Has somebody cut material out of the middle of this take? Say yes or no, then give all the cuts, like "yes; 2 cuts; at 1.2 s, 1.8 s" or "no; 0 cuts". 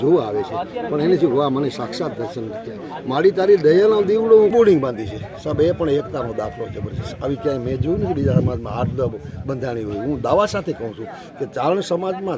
yes; 1 cut; at 4.5 s